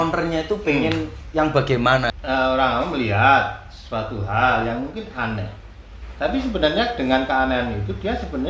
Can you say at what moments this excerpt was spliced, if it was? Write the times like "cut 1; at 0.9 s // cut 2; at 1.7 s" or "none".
cut 1; at 2.1 s

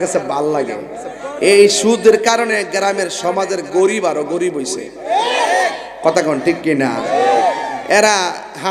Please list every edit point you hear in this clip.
none

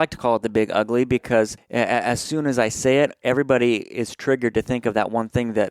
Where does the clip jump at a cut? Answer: cut 1; at 1.6 s

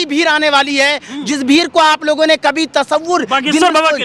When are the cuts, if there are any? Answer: none

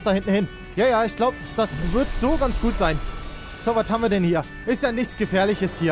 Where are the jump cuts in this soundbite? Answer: none

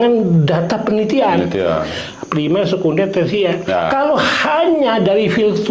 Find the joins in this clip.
none

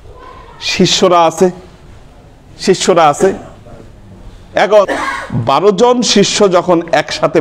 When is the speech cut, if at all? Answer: cut 1; at 4.9 s

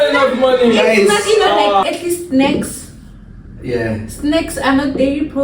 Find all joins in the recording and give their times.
cut 1; at 1.9 s

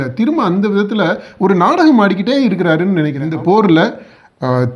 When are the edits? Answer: cut 1; at 3.2 s

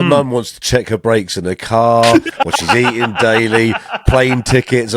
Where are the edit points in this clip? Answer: none

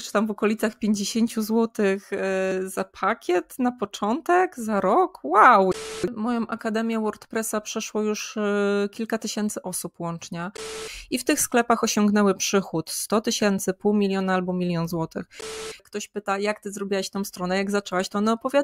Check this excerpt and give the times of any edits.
cut 1; at 2.5 s // cut 2; at 5.8 s // cut 3; at 10.9 s // cut 4; at 15.5 s

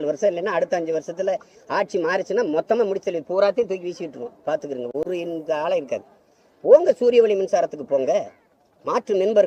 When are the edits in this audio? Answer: none

